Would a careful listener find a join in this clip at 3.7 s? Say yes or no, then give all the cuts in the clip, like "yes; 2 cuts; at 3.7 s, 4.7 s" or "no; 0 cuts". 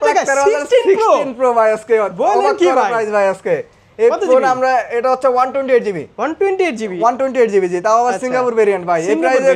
no; 0 cuts